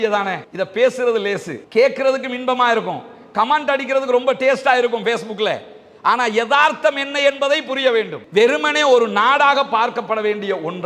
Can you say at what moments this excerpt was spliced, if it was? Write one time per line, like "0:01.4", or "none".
0:08.2